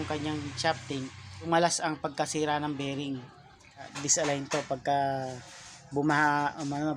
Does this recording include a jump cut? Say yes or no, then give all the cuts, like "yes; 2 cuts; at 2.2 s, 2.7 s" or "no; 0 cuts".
yes; 2 cuts; at 1.5 s, 3.9 s